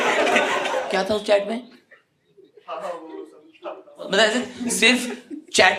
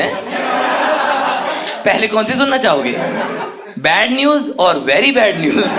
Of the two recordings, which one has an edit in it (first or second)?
first